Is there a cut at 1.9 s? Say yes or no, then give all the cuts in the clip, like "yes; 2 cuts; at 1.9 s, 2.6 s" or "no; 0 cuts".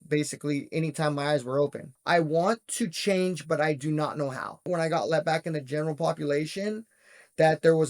yes; 2 cuts; at 1.9 s, 4.7 s